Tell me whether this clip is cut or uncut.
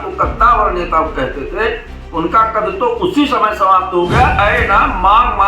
cut